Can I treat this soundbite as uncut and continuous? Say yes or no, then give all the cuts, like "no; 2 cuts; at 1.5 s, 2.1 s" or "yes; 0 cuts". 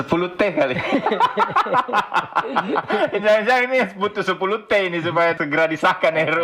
yes; 0 cuts